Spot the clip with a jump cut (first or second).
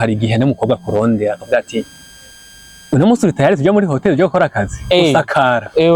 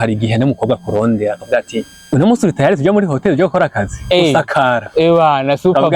second